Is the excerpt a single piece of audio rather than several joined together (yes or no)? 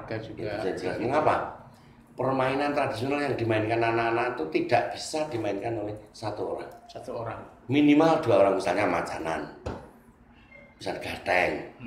yes